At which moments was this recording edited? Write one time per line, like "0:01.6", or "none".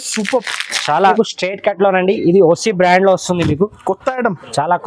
0:01.1